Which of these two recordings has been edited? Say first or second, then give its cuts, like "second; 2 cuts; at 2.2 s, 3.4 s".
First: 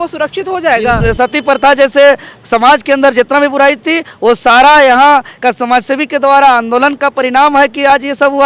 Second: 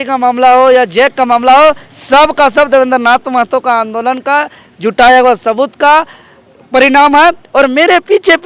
first; 1 cut; at 1.0 s